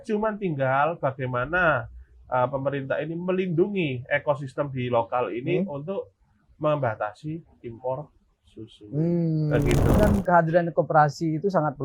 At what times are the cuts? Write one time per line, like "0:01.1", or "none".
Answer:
0:10.0